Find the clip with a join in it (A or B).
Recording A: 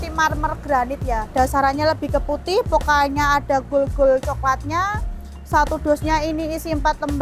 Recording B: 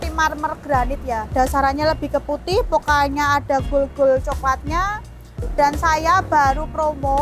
B